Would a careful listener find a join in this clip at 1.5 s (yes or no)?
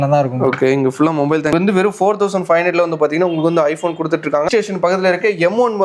yes